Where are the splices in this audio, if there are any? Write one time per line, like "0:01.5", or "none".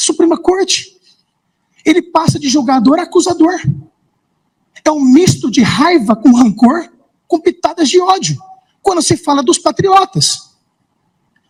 none